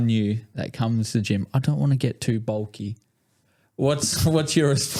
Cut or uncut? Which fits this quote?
uncut